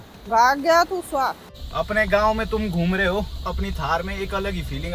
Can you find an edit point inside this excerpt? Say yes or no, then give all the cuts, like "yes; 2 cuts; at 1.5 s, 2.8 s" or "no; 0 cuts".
yes; 1 cut; at 1.5 s